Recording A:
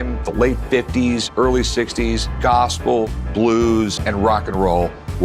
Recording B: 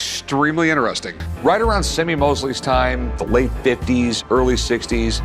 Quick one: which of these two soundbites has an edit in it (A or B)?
A